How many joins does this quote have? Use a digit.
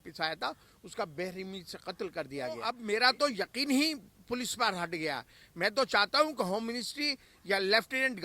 1